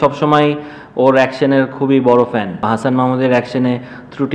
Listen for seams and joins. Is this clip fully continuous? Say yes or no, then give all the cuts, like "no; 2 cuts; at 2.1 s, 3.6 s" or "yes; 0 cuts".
no; 1 cut; at 2.6 s